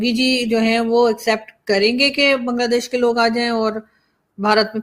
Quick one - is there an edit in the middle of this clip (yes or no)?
no